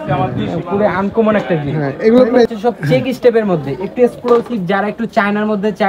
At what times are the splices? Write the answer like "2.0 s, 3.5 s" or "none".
2.5 s